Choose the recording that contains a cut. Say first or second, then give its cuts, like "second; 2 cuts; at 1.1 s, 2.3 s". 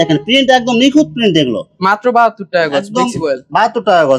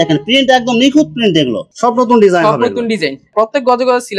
second; 2 cuts; at 1.7 s, 3.3 s